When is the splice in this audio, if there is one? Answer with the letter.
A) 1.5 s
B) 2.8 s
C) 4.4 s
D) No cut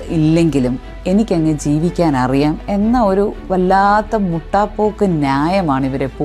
D